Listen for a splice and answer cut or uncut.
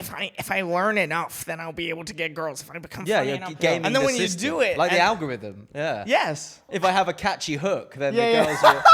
cut